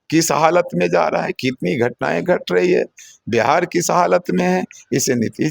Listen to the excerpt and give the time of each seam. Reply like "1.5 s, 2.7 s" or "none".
none